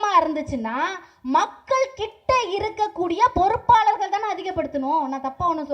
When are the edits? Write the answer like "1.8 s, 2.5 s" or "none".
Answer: none